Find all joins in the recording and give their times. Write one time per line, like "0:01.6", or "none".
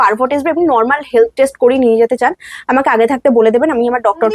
none